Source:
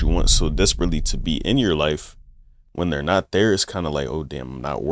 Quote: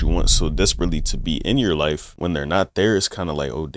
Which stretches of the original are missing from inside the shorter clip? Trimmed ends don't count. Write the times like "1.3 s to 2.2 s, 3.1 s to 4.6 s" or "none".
2.1 s to 2.6 s